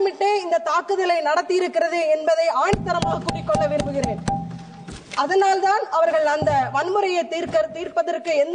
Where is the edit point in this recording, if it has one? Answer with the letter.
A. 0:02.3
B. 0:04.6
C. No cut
C